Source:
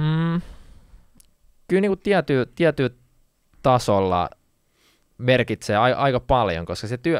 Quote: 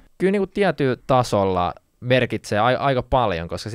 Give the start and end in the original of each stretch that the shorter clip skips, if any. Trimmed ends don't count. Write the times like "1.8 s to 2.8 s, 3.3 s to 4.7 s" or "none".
2.5 s to 3.6 s, 4.4 s to 5.1 s